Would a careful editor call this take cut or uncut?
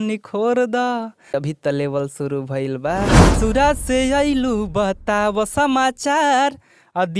cut